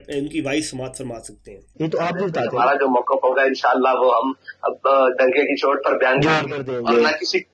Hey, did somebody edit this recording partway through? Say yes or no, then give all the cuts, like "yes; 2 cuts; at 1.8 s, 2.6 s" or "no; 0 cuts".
yes; 1 cut; at 1.7 s